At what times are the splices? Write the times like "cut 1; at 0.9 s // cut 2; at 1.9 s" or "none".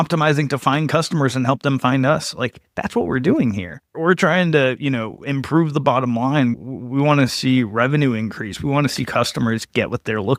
none